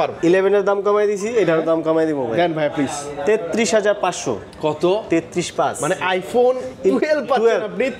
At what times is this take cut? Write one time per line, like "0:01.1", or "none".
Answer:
none